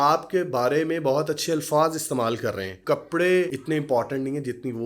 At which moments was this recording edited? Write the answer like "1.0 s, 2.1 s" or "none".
2.7 s, 3.6 s